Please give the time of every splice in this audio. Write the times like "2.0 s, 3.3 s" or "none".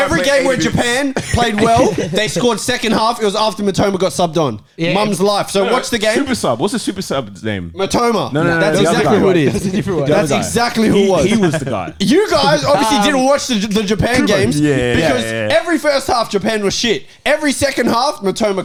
none